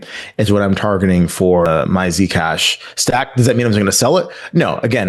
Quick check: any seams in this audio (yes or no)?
yes